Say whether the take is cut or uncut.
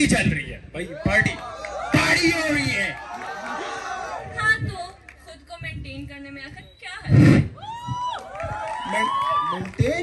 uncut